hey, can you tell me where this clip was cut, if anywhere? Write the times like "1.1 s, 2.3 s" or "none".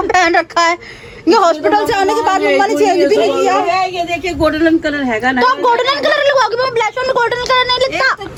none